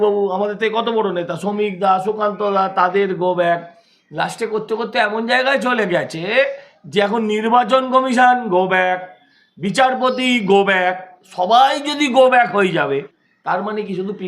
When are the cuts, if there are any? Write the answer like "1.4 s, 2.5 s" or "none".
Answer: 13.2 s